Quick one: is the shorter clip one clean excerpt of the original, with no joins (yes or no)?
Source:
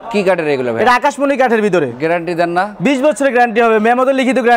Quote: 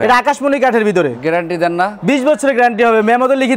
yes